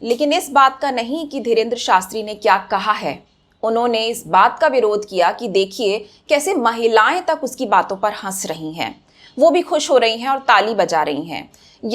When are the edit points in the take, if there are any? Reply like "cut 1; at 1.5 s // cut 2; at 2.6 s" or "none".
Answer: none